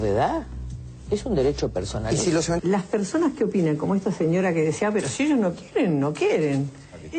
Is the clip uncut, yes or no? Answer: no